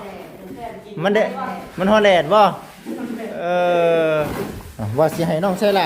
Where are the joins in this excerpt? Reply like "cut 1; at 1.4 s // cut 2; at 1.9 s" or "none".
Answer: cut 1; at 4.3 s